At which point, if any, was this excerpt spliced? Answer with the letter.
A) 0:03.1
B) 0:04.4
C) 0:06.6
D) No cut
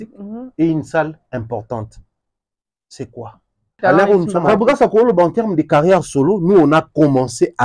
B